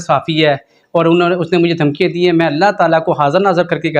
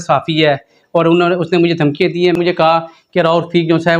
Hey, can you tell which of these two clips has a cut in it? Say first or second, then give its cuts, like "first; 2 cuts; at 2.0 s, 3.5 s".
second; 1 cut; at 2.4 s